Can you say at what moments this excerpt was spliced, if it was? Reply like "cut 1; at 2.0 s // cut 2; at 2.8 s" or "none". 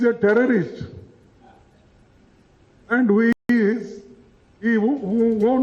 cut 1; at 3.3 s